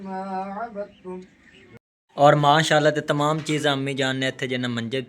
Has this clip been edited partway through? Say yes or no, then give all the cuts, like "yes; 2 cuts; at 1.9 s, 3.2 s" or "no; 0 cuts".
yes; 1 cut; at 1.8 s